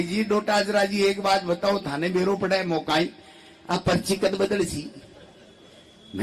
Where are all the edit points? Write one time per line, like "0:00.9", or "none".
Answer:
none